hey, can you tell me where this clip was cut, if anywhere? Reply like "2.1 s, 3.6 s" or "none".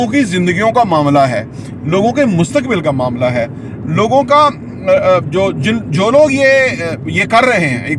none